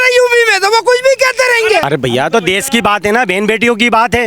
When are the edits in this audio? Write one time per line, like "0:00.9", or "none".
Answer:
0:01.8

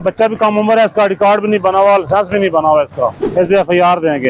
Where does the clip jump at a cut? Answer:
0:03.2

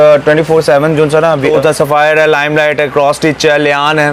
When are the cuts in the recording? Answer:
0:01.5

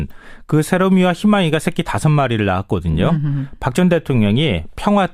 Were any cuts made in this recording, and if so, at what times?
0:03.8

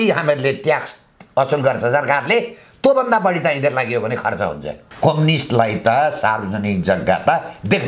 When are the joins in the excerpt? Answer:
0:04.9

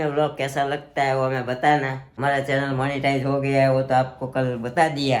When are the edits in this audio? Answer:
0:02.0

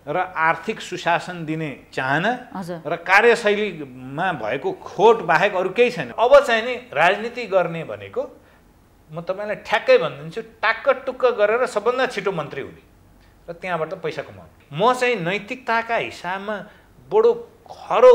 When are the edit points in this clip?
0:06.1
0:14.5

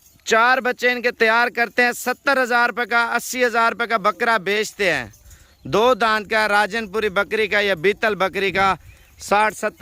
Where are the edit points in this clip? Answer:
none

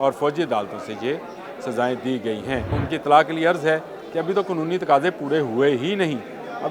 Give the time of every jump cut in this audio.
0:02.8

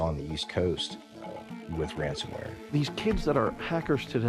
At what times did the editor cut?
0:02.8

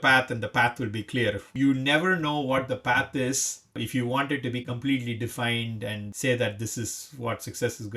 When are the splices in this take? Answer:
0:01.6
0:03.8
0:06.0

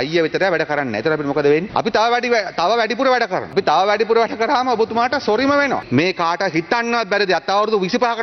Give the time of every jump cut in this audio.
0:01.7
0:03.5
0:05.8

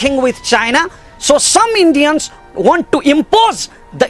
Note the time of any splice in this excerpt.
0:02.4

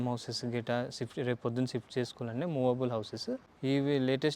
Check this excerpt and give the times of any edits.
0:03.5

